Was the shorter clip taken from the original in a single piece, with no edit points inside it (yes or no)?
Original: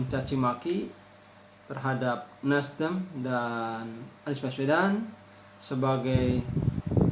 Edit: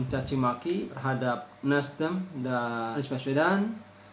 no